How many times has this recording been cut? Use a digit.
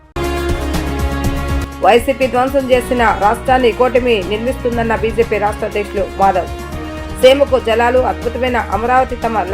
1